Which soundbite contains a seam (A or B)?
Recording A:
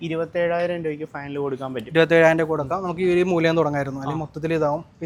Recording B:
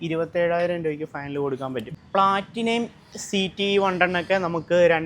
B